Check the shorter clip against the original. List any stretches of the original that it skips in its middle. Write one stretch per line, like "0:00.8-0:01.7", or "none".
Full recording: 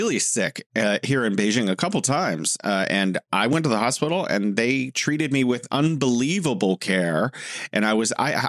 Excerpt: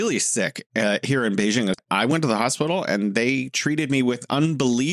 0:01.8-0:03.2